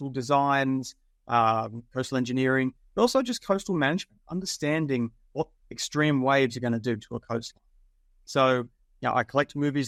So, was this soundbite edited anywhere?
no; 0 cuts

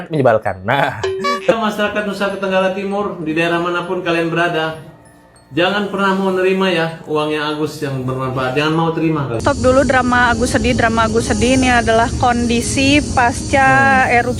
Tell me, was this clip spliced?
yes; 2 cuts; at 1.5 s, 9.4 s

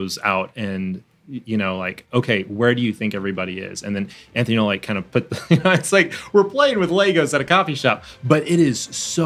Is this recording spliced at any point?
no; 0 cuts

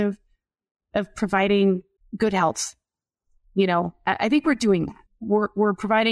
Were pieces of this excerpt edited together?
yes; 2 cuts; at 2.0 s, 5.0 s

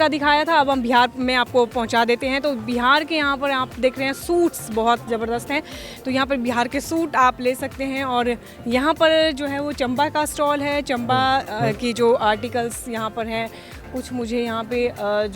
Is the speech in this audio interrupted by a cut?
no; 0 cuts

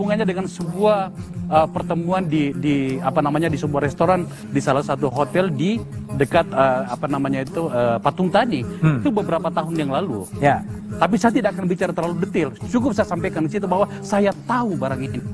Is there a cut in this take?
no; 0 cuts

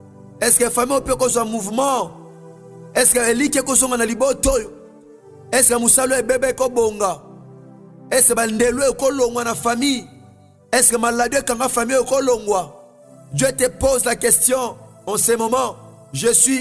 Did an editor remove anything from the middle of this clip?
no; 0 cuts

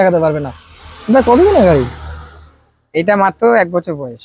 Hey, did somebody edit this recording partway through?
no; 0 cuts

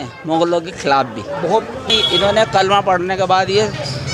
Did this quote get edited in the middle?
yes; 1 cut; at 1.9 s

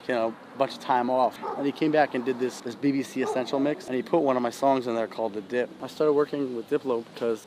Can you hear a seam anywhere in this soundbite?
yes; 4 cuts; at 1.5 s, 2.7 s, 3.8 s, 5.8 s

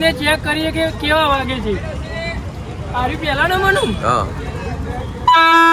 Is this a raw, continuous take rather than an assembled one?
yes; 0 cuts

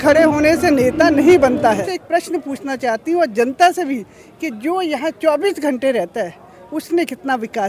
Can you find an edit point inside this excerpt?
yes; 1 cut; at 1.9 s

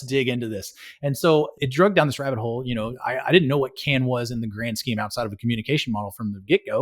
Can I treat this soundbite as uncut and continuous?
no; 1 cut; at 1.6 s

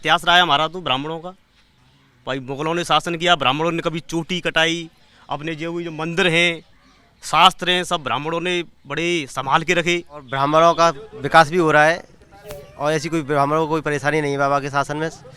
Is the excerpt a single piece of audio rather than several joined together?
no; 1 cut; at 10.3 s

